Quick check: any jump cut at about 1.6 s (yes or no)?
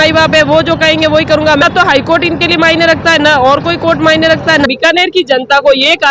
yes